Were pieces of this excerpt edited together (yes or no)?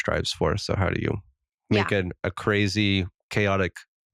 no